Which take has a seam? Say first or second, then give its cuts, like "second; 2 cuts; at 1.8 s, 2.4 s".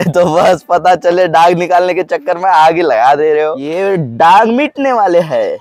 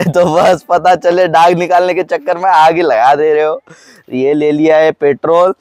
first; 1 cut; at 3.7 s